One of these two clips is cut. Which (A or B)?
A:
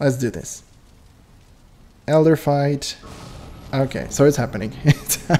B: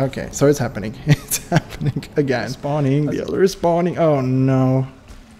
B